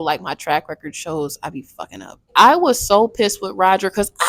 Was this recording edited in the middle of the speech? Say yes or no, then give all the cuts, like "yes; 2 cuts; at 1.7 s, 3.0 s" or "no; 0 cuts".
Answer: yes; 1 cut; at 2.3 s